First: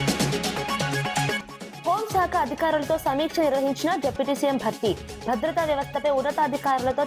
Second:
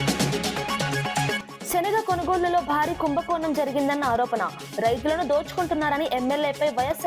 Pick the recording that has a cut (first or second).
second